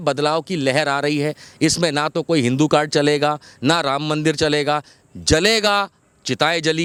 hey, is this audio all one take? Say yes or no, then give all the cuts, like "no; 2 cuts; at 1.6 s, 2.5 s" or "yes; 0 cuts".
yes; 0 cuts